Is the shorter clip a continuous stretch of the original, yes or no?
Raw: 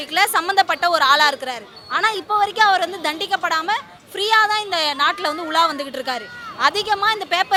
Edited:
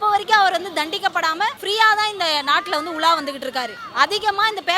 no